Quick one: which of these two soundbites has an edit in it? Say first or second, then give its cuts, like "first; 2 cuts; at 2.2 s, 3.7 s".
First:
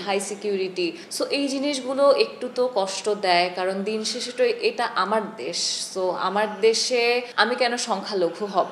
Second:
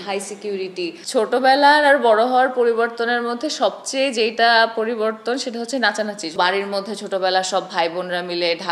second; 2 cuts; at 1.0 s, 6.3 s